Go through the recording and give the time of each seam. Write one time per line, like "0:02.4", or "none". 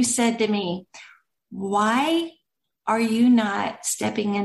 none